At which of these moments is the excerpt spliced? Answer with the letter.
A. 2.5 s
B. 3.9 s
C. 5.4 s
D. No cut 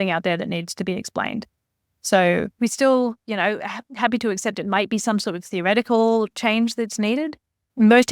A